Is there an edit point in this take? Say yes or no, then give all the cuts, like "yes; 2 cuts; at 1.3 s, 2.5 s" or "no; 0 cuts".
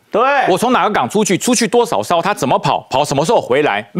no; 0 cuts